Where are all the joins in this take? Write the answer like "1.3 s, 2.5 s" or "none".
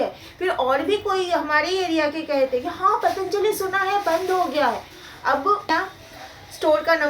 5.7 s